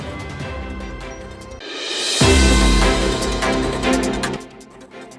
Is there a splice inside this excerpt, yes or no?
no